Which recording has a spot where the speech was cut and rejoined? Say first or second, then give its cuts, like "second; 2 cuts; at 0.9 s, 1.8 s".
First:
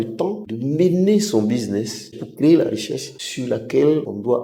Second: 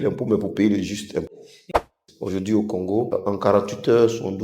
second; 2 cuts; at 1.9 s, 3.1 s